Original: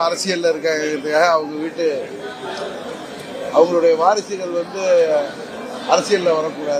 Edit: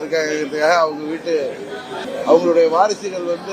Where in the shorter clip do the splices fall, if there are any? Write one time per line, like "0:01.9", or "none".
0:01.9